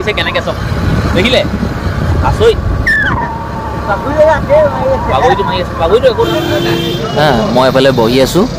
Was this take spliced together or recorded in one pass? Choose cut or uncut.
cut